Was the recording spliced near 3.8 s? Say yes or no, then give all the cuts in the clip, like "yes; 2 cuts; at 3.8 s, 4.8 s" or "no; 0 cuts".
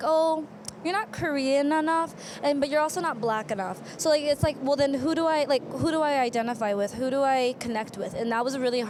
no; 0 cuts